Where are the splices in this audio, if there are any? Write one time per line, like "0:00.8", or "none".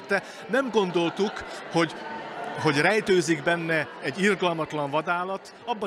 0:04.0

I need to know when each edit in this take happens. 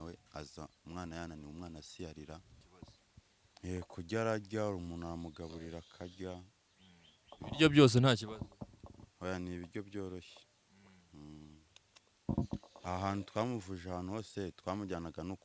0:02.7
0:12.3

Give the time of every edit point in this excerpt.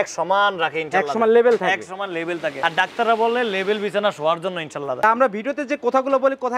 0:02.5
0:05.0

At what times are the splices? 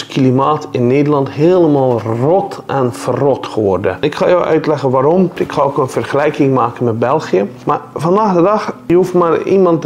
0:04.0
0:05.4
0:07.6
0:08.8

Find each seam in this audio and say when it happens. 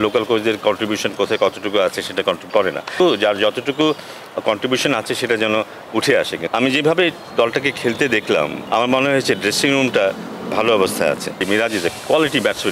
0:02.9
0:06.4
0:08.6
0:11.4

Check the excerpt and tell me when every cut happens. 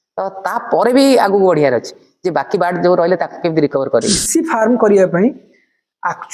0:04.2

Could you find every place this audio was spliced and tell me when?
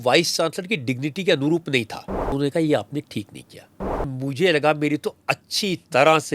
0:02.3
0:04.1

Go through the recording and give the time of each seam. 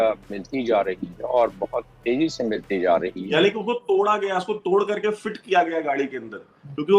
0:03.2

